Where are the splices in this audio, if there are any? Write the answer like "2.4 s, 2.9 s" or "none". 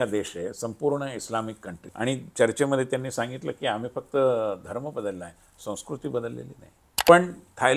1.8 s, 7.1 s